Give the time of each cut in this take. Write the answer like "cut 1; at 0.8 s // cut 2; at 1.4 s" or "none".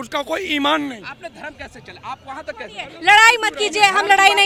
none